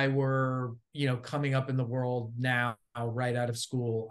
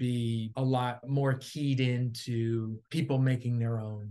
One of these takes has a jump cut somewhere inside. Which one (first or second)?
second